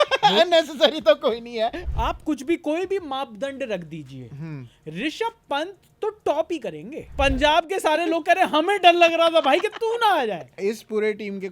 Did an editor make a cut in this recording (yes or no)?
yes